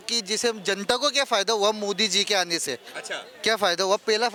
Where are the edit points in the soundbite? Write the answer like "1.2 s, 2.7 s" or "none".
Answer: none